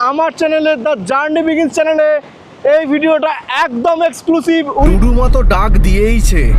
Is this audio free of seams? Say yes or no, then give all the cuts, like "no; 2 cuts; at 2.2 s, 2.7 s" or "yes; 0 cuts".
no; 1 cut; at 4.9 s